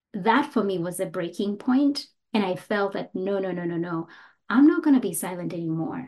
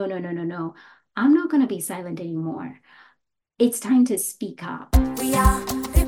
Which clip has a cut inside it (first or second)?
second